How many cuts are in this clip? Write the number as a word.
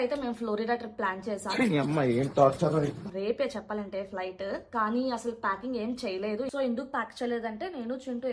zero